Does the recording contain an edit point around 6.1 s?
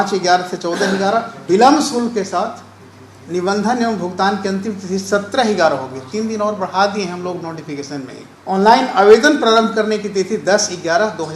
no; 1 cut; at 8.3 s

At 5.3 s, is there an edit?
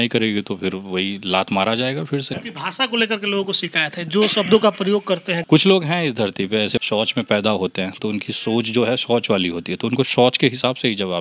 yes; 3 cuts; at 2.4 s, 5.3 s, 6.8 s

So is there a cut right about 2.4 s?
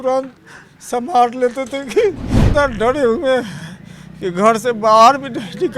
yes; 1 cut; at 2.4 s

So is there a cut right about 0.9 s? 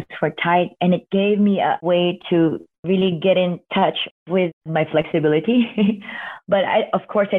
no; 1 cut; at 4.1 s

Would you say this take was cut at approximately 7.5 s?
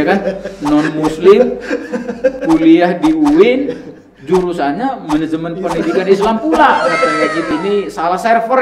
yes; 1 cut; at 7.5 s

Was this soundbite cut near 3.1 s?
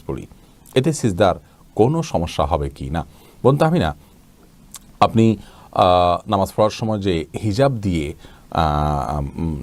no; 0 cuts

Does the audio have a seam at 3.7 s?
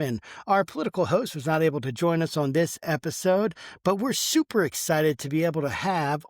no; 0 cuts

